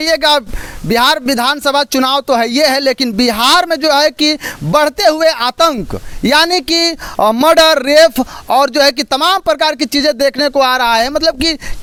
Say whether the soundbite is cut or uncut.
uncut